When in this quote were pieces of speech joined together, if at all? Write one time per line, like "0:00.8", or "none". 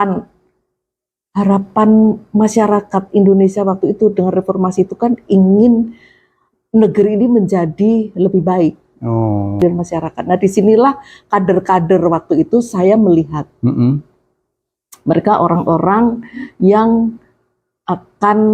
0:09.5